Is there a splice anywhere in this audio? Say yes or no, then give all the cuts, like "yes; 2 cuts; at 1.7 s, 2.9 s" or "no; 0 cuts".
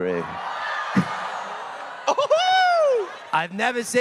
no; 0 cuts